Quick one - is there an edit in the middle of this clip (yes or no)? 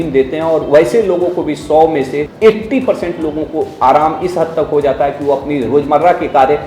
yes